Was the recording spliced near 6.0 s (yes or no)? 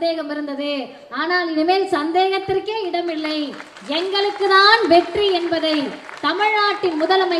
no